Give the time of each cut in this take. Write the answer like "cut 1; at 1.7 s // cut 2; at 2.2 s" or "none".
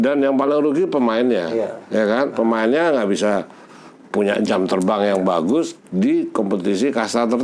none